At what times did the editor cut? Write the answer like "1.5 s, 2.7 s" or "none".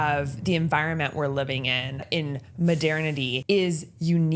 2.0 s, 3.4 s